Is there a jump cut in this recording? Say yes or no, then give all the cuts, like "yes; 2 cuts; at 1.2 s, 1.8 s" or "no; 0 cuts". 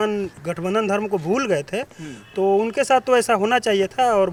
no; 0 cuts